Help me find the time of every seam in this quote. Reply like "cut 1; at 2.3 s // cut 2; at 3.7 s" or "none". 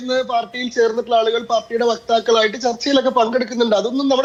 none